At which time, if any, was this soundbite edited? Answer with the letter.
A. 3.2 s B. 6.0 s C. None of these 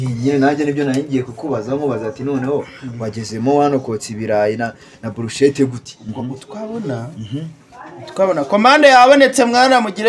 B